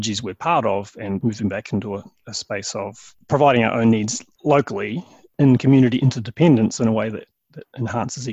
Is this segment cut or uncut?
cut